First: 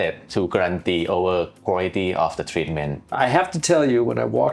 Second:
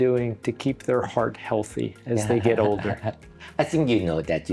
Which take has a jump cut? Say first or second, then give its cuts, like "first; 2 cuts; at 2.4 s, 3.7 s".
first; 1 cut; at 3.1 s